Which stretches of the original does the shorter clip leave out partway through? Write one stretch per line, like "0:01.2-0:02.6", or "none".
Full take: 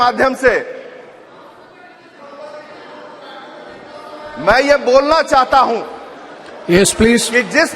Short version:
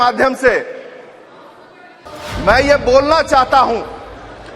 0:02.1-0:04.1